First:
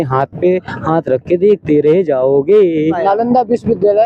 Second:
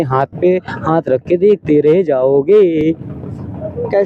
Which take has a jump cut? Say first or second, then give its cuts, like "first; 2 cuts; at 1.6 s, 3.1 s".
first; 1 cut; at 2.8 s